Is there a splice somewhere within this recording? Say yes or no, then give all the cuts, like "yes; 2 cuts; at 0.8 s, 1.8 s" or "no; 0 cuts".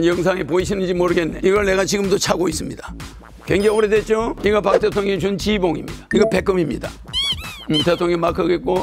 yes; 3 cuts; at 1.3 s, 4.4 s, 5.9 s